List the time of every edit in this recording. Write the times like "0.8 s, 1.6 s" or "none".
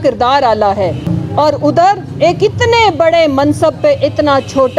1.1 s